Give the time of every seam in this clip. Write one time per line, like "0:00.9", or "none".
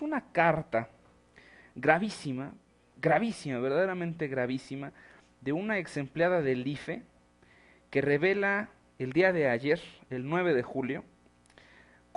0:08.8